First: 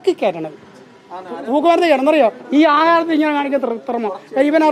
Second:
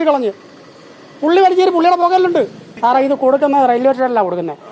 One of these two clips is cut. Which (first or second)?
second